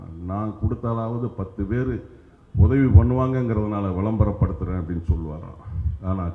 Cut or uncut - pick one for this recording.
uncut